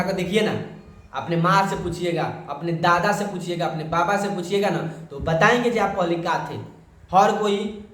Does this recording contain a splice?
no; 0 cuts

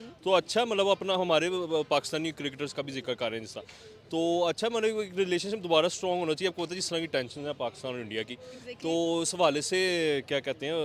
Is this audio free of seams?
yes; 0 cuts

